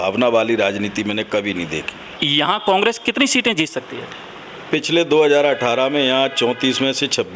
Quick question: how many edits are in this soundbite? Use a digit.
1